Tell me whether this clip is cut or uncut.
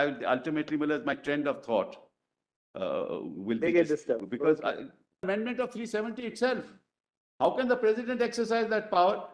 cut